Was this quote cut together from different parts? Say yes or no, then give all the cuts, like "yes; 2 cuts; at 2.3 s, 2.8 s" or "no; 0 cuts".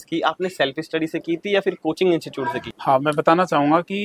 no; 0 cuts